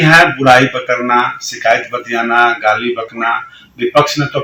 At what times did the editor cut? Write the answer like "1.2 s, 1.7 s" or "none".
none